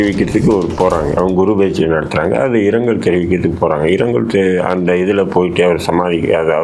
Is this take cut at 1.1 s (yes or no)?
yes